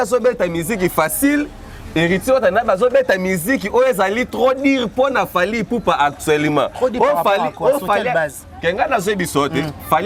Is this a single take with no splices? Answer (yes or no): yes